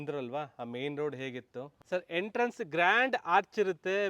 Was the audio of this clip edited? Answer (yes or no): yes